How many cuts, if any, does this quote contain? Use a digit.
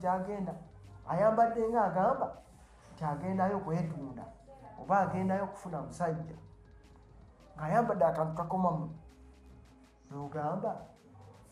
0